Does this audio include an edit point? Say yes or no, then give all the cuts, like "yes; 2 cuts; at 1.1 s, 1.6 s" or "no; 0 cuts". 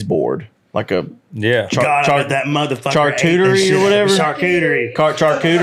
no; 0 cuts